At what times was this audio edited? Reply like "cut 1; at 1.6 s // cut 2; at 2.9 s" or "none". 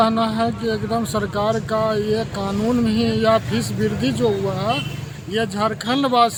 none